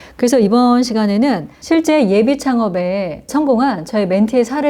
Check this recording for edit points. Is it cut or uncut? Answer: cut